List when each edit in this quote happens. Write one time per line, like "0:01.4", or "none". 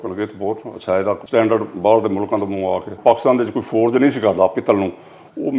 0:01.2
0:03.0